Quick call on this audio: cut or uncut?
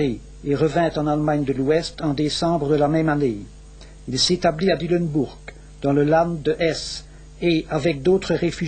cut